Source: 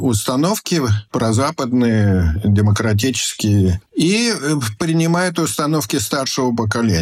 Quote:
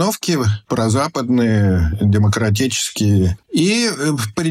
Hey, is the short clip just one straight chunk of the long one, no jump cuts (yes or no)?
yes